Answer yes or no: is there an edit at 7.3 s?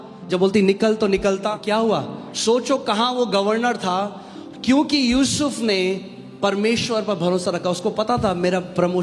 no